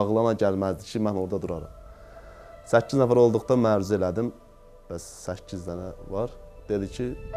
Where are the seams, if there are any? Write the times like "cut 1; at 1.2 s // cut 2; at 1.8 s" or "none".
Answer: none